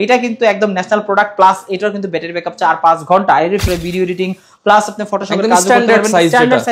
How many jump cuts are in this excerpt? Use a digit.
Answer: 1